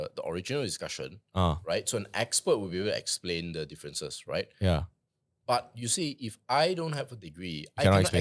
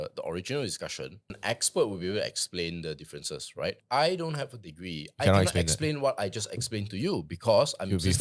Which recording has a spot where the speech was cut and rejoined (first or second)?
second